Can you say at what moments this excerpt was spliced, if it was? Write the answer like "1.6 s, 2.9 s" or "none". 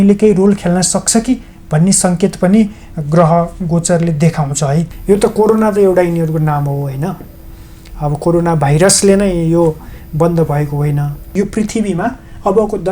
4.9 s, 11.3 s